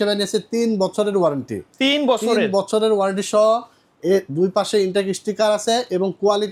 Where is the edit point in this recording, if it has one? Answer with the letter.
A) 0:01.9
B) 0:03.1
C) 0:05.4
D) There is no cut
D